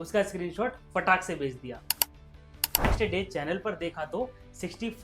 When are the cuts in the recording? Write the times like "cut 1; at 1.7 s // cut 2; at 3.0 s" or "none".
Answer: cut 1; at 2.9 s